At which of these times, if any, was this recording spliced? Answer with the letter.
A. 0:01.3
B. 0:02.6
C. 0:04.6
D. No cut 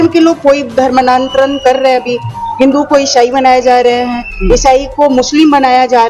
D